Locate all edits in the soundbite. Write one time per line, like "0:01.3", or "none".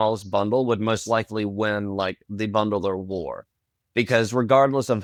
none

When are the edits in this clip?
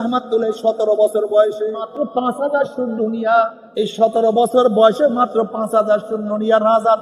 0:01.8
0:03.6

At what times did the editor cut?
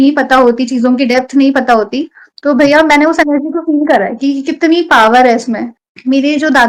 0:05.7

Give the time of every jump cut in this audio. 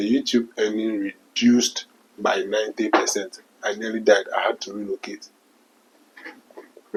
none

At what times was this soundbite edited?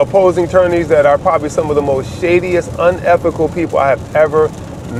none

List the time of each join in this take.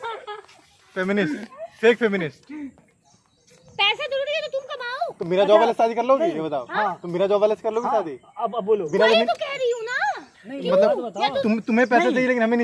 0:02.9

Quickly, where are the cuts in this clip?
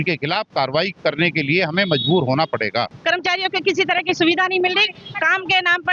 0:02.9

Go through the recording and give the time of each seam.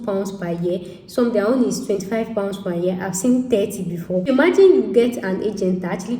0:04.2

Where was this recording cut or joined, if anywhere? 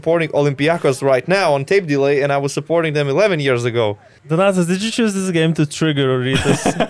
0:04.1

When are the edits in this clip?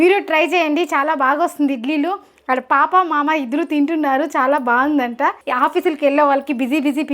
0:05.4

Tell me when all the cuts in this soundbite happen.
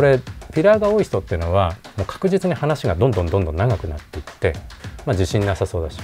0:04.7

